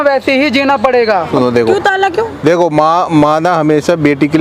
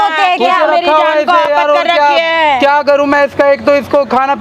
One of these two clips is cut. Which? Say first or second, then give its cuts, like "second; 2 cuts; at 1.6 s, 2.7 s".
first; 1 cut; at 1.3 s